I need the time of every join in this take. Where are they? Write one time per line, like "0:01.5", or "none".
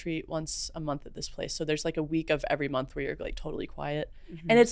none